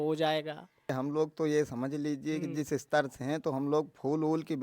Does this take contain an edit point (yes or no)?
yes